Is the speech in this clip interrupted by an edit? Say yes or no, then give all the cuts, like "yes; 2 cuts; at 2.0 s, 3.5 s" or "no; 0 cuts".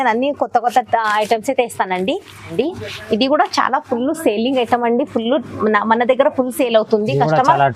yes; 1 cut; at 2.5 s